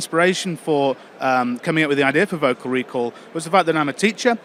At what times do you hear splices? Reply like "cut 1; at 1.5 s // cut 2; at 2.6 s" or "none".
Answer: none